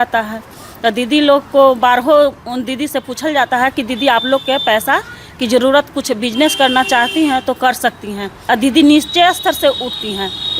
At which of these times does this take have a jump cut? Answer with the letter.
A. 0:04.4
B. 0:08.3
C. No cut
B